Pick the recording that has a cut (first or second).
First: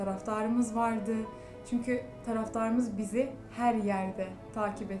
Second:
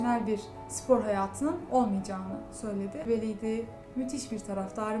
second